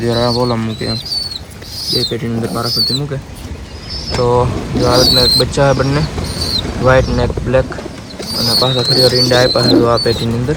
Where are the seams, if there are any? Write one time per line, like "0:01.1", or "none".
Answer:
none